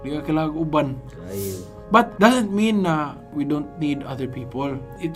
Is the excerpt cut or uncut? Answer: uncut